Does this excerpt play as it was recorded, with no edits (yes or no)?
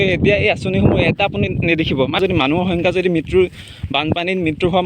no